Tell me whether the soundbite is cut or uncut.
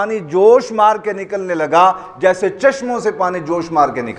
uncut